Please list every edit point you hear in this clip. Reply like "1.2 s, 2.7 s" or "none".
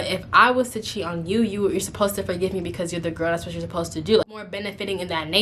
4.5 s